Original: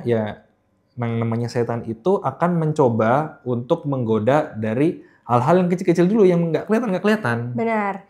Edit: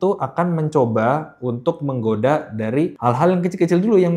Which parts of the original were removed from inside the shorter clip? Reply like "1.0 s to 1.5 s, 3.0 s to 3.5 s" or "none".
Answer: 5.0 s to 5.2 s